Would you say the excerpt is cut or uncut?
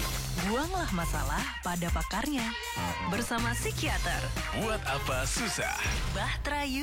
uncut